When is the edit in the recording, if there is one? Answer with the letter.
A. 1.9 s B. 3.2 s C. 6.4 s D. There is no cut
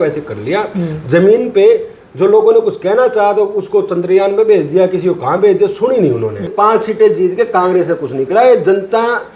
C